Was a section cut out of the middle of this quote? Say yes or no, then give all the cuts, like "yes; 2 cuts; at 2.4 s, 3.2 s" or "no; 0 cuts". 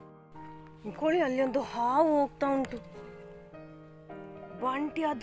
no; 0 cuts